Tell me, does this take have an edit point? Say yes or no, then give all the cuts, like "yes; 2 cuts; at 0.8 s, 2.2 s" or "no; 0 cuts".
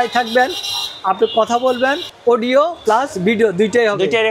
no; 0 cuts